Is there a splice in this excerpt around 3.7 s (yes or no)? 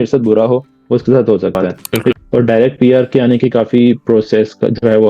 no